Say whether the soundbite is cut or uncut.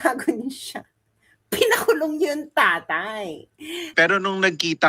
cut